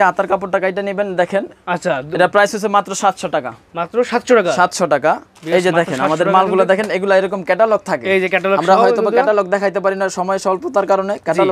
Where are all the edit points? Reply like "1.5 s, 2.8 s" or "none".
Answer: none